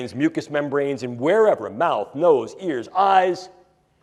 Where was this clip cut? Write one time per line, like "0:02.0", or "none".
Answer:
none